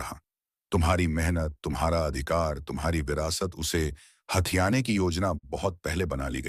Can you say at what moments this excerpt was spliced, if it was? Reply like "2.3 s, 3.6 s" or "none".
none